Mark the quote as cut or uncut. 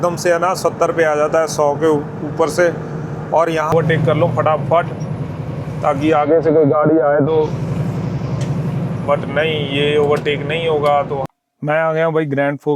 cut